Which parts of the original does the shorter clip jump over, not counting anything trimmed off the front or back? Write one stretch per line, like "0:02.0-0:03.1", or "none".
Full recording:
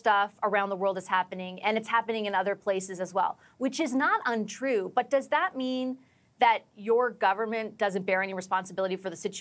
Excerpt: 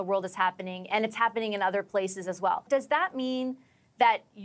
0:03.4-0:05.1